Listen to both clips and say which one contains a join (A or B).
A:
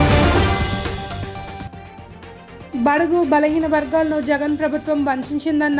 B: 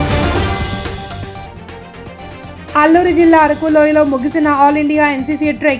B